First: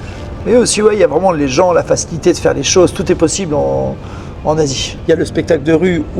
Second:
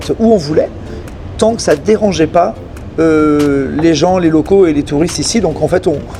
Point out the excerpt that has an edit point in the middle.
first; 1 cut; at 4.9 s

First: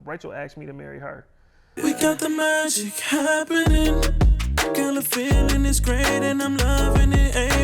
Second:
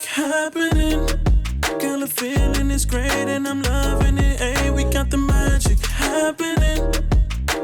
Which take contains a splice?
first; 1 cut; at 1.6 s

